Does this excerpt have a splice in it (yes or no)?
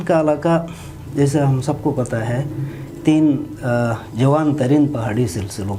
no